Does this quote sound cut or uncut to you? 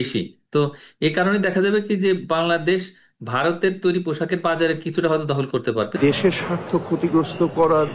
cut